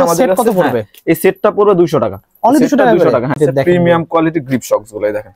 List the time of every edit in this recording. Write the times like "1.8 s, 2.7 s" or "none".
3.4 s